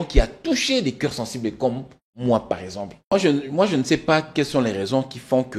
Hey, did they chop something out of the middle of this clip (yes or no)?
yes